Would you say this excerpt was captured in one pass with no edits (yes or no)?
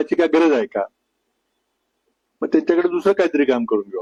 yes